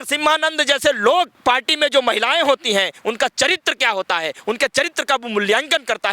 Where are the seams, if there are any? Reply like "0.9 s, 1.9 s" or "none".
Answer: 1.3 s